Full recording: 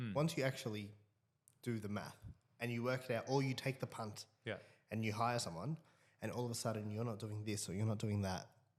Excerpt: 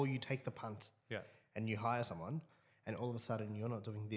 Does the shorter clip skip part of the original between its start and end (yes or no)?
no